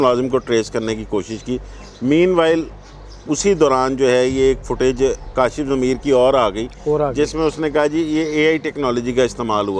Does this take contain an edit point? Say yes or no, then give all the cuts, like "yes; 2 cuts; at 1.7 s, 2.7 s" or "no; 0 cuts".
no; 0 cuts